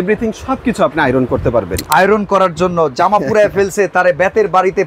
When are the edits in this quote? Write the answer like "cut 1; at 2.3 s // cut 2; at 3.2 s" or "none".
cut 1; at 1.8 s